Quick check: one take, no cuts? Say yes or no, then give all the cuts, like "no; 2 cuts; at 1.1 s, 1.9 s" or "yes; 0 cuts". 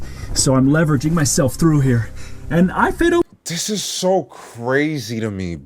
yes; 0 cuts